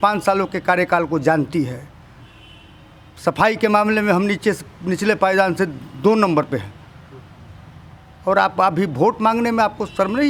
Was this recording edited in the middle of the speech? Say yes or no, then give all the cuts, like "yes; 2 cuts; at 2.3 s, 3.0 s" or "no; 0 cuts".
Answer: no; 0 cuts